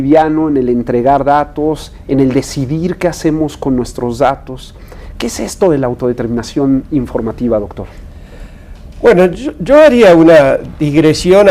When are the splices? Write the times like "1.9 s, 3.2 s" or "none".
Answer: 8.0 s